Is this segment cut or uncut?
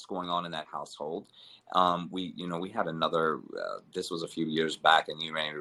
uncut